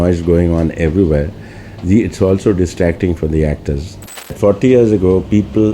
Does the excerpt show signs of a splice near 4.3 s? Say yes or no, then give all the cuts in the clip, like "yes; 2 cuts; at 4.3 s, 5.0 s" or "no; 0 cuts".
yes; 1 cut; at 4.3 s